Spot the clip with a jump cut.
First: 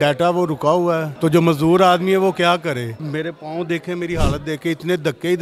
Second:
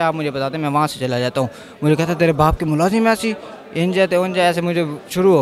first; 2 cuts; at 1.1 s, 3.0 s

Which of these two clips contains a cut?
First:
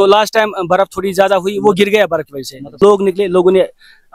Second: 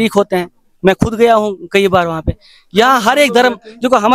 first; 1 cut; at 2.7 s

